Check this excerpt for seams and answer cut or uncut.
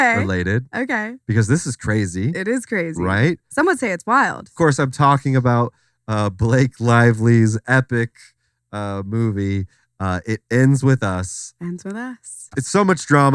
cut